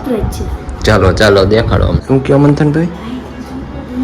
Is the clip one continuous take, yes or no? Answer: no